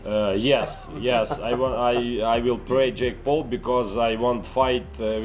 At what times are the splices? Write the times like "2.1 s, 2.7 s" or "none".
none

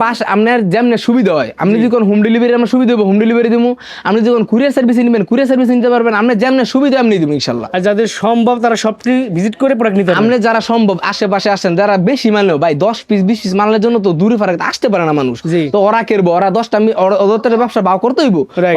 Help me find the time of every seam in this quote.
none

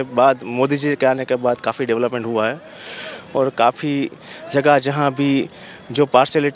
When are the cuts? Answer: none

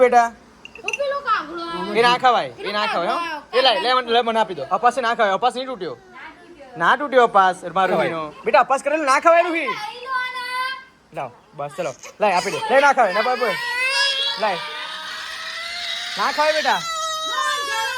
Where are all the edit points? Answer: 4.6 s, 7.9 s, 12.7 s

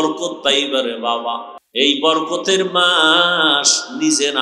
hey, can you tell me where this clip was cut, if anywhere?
1.6 s

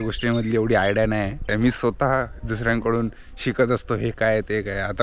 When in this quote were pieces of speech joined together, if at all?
1.5 s

